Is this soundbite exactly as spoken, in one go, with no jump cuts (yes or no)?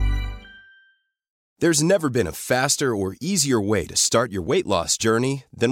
no